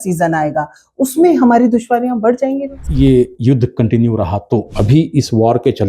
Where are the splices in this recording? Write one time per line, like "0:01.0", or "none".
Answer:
0:02.8
0:04.7